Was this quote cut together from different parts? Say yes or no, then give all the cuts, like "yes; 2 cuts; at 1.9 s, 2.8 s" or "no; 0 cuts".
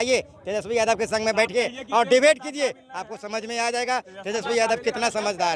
no; 0 cuts